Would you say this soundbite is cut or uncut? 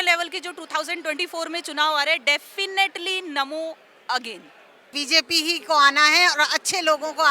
cut